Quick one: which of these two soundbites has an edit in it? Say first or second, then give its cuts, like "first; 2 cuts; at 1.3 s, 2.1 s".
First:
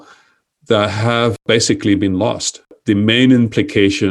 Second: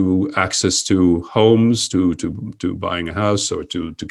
first; 2 cuts; at 1.4 s, 2.7 s